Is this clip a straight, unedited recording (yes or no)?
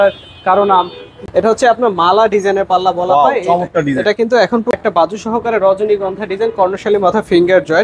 no